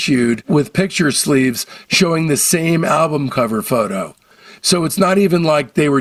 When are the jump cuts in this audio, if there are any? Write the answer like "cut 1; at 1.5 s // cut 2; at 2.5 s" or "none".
none